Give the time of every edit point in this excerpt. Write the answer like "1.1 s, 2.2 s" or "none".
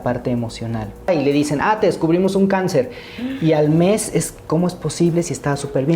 1.1 s